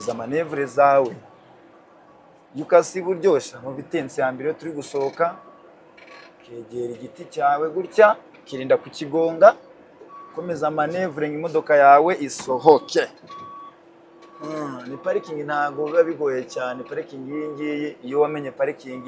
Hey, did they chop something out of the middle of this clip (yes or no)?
no